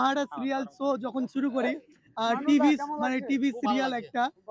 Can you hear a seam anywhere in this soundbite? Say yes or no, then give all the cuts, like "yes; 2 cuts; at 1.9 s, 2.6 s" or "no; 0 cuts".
no; 0 cuts